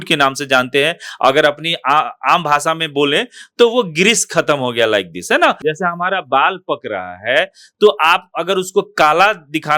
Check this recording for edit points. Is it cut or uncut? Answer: cut